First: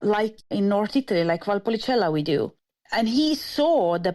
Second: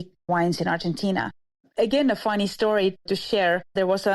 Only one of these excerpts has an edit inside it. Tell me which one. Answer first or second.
second